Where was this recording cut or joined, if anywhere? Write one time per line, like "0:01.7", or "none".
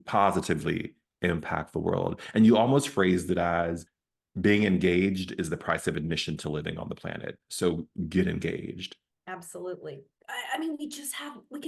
0:10.1